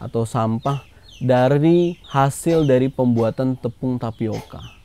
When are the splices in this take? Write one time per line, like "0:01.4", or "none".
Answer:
0:02.0